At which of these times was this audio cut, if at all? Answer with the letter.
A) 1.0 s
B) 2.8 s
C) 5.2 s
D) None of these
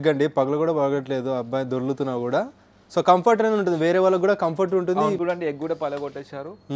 C